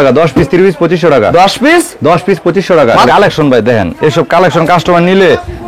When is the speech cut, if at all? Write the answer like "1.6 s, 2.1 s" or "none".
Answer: 3.0 s